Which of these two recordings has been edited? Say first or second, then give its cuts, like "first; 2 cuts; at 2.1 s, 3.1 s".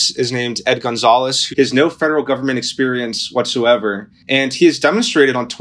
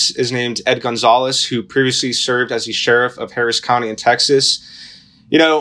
first; 2 cuts; at 1.4 s, 4.1 s